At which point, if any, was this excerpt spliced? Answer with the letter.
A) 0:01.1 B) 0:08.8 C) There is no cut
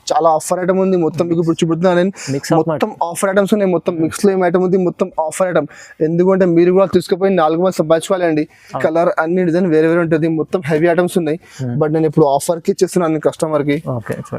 B